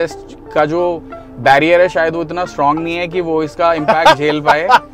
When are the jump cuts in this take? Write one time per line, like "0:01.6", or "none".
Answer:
none